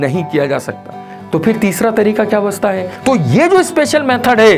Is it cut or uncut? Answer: cut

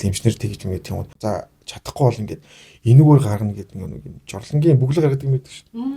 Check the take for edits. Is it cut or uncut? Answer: cut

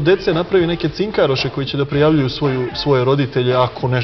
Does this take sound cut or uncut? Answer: uncut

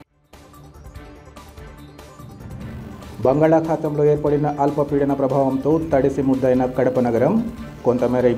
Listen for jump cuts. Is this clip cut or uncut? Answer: uncut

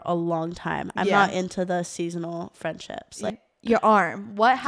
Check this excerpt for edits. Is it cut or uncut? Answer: cut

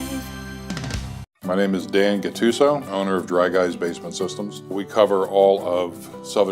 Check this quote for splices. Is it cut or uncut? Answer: cut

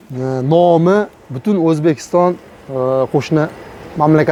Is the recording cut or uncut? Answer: uncut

